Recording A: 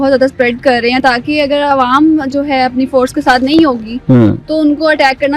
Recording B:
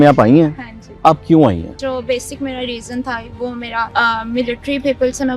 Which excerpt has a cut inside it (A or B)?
B